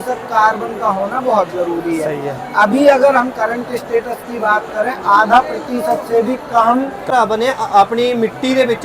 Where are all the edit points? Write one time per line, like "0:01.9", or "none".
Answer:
0:07.0